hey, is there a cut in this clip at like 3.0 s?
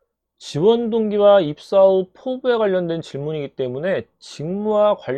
no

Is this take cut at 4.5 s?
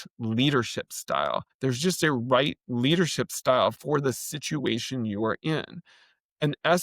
no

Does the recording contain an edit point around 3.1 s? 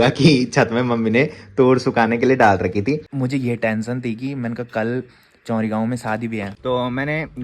yes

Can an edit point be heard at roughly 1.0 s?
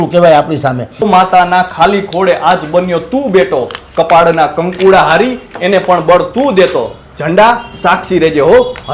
yes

